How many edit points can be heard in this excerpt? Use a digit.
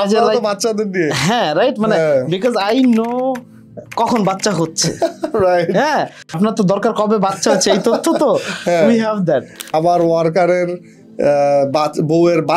2